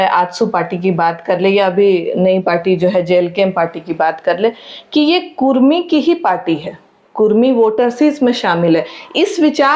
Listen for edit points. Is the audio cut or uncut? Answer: uncut